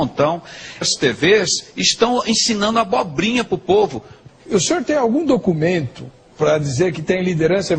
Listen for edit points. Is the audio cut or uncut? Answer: uncut